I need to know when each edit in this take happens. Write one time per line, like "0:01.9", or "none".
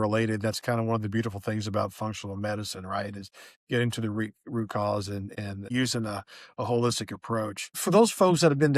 0:05.6
0:07.6